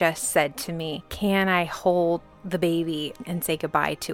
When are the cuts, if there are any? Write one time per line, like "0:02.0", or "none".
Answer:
0:01.0
0:02.3
0:03.2